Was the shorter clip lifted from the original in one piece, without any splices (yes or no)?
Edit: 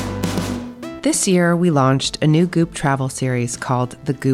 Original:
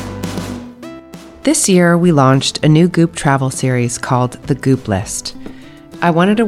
no